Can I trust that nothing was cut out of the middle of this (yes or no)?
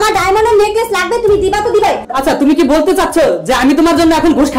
no